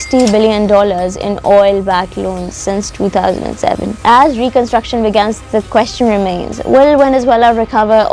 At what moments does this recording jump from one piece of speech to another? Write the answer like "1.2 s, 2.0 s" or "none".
3.9 s